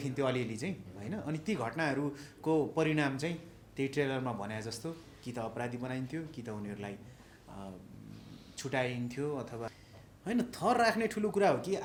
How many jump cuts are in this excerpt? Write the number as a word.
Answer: zero